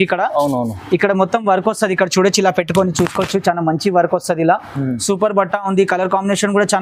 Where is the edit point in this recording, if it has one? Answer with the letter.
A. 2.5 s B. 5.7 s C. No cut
C